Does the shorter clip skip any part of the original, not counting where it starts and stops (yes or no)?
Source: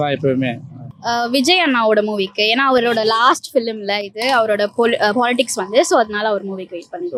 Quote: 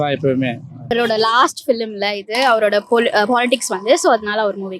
yes